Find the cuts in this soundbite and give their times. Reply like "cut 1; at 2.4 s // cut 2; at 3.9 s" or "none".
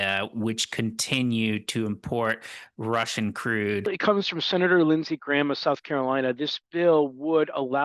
cut 1; at 3.9 s

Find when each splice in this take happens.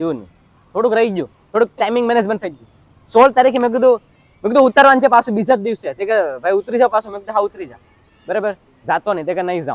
none

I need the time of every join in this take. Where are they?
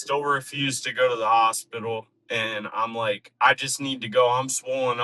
none

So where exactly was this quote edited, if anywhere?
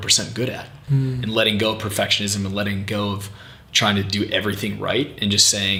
none

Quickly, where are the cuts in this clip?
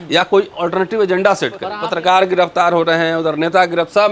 cut 1; at 1.7 s

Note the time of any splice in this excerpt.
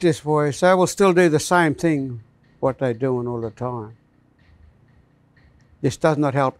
none

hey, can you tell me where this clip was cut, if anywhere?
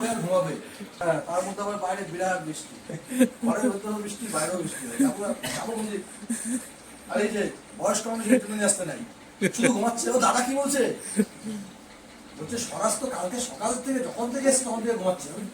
cut 1; at 1.0 s

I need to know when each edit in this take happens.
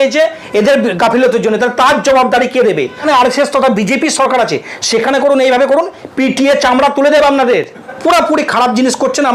cut 1; at 3.0 s // cut 2; at 8.0 s

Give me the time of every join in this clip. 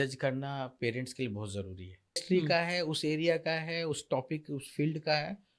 cut 1; at 2.2 s

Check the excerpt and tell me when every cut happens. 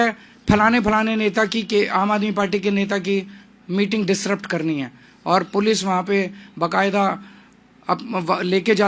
none

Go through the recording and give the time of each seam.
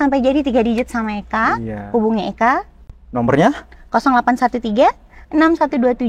none

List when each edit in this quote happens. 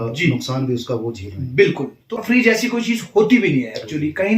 cut 1; at 2.2 s

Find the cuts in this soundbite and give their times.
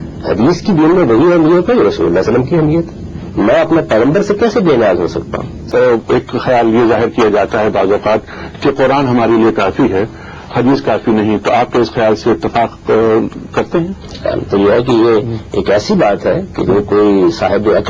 cut 1; at 5.7 s

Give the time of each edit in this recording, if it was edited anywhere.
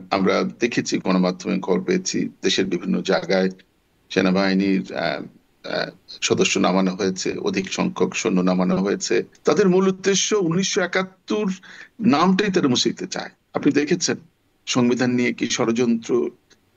cut 1; at 9.3 s

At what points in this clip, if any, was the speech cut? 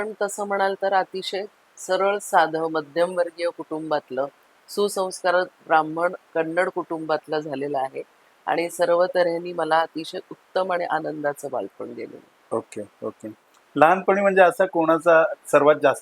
none

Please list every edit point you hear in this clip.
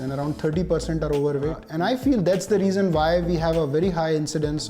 cut 1; at 1.6 s

